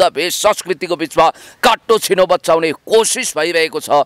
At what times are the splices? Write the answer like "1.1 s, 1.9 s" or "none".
none